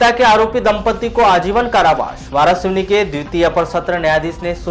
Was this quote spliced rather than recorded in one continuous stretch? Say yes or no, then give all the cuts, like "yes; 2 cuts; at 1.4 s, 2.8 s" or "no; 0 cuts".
no; 0 cuts